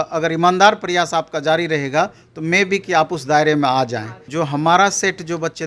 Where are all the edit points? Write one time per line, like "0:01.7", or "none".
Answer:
0:04.2